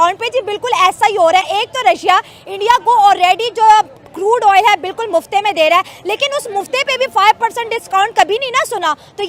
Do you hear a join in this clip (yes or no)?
no